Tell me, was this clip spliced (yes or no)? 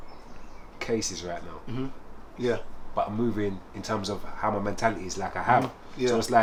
no